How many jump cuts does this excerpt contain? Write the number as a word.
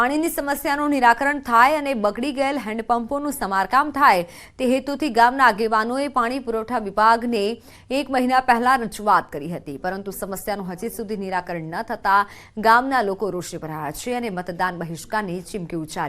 one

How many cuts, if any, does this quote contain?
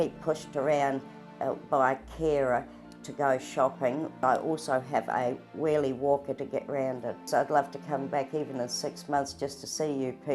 two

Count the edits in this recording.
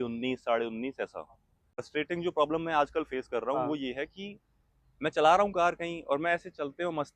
one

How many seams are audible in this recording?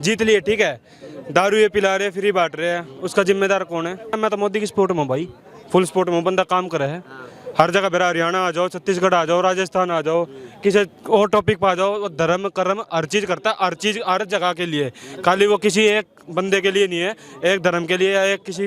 one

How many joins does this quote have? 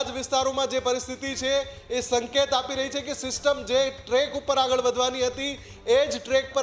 zero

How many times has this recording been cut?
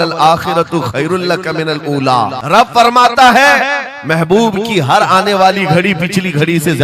one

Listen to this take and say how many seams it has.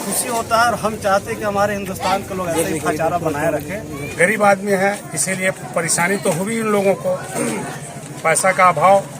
one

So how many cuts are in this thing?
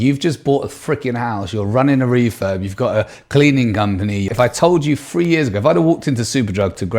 one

